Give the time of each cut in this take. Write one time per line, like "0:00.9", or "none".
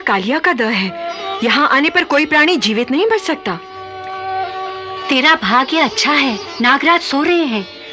none